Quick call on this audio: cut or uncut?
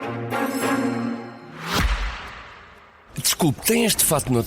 cut